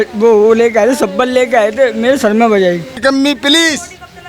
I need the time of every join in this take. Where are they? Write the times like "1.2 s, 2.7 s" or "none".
3.0 s